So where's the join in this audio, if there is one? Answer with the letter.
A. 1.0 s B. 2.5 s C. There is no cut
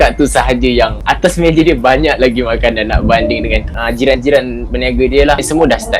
A